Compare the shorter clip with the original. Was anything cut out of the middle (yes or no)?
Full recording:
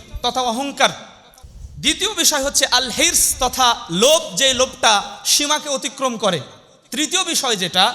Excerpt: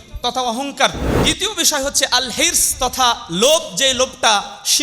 yes